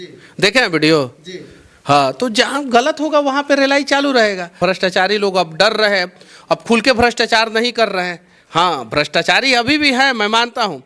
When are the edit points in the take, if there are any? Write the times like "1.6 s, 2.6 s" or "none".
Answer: 4.5 s